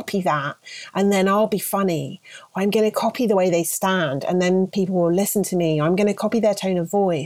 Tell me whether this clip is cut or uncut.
uncut